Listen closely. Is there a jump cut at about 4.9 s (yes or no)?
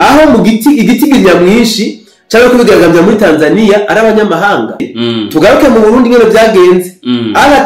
yes